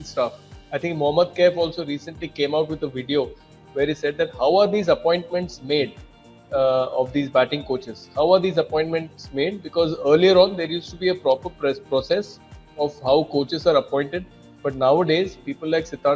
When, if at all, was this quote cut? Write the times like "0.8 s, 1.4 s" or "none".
none